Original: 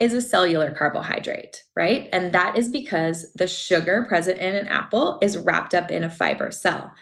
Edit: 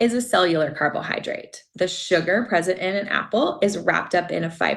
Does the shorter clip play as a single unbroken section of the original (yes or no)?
no